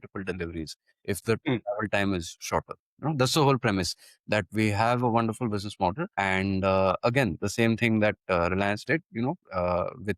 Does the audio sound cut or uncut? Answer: cut